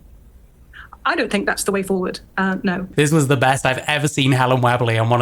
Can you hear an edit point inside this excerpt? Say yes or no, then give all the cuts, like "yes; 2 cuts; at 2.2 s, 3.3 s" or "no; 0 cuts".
yes; 1 cut; at 2.8 s